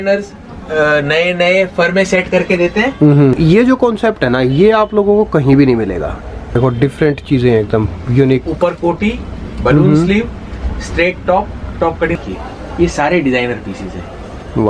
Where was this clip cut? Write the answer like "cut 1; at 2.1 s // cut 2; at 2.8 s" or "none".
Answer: cut 1; at 3.4 s // cut 2; at 6.6 s // cut 3; at 12.2 s